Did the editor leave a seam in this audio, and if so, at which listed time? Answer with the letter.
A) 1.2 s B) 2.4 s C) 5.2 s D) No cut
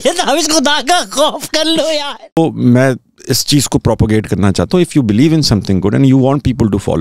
B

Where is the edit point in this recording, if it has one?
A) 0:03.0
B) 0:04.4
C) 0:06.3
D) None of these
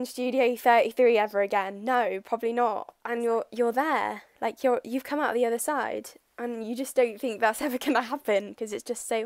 A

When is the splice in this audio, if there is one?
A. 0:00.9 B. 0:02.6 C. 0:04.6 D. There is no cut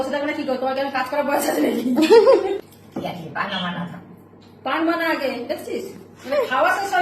B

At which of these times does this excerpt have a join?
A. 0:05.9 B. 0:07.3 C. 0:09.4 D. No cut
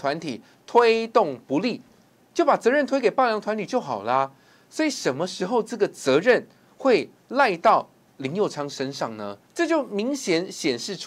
C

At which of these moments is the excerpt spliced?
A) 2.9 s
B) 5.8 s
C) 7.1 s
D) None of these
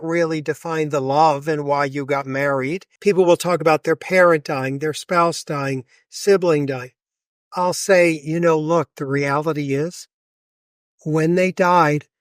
A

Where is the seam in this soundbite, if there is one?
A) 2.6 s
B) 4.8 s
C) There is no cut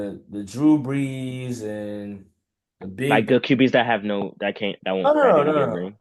C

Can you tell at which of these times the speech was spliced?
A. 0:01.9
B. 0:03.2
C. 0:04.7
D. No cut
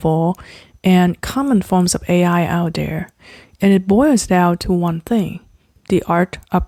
D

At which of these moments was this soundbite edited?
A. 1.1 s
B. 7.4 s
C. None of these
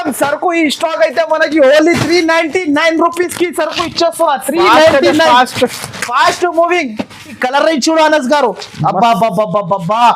B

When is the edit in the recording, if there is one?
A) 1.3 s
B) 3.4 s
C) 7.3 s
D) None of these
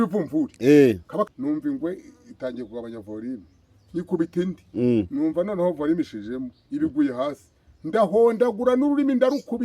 A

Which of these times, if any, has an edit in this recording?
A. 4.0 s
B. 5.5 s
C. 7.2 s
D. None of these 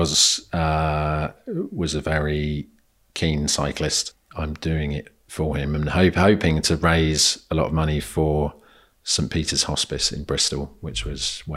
A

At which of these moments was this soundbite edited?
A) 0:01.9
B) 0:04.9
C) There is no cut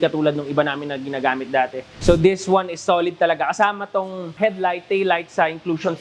C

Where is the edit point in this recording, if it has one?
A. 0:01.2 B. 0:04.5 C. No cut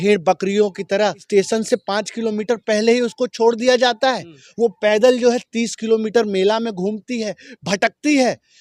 A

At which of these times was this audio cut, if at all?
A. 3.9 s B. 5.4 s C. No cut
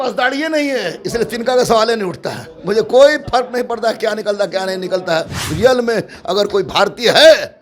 B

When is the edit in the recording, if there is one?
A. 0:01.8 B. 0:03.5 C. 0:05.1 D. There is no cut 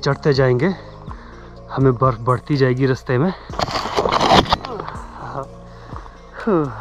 B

